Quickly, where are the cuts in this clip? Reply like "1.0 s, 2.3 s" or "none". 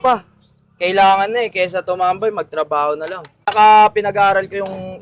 3.5 s